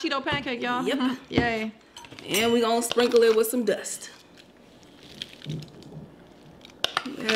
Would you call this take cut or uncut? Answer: uncut